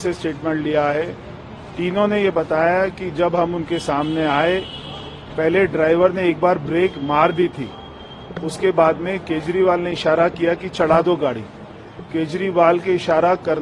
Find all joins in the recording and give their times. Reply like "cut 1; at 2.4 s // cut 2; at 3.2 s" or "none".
none